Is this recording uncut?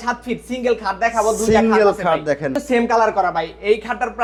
yes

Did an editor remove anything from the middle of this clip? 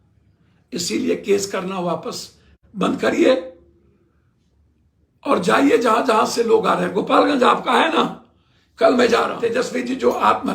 yes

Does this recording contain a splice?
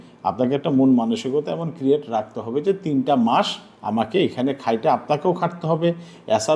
no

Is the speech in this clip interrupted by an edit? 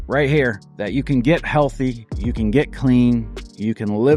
no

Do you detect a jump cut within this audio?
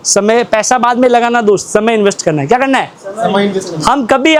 no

